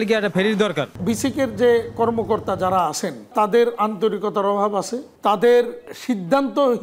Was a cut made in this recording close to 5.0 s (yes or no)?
yes